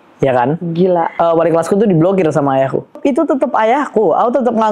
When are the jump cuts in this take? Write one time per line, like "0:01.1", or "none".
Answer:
0:01.1
0:03.0